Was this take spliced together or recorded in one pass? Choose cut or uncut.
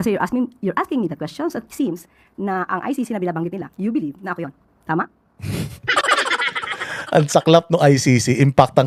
uncut